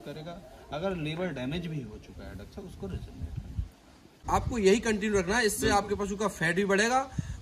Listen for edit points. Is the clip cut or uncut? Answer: cut